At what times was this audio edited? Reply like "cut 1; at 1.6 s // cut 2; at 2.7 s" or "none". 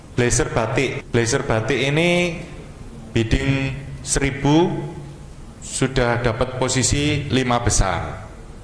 cut 1; at 1.0 s